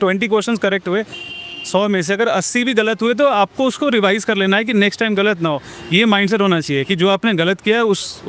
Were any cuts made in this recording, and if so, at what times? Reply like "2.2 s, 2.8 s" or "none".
none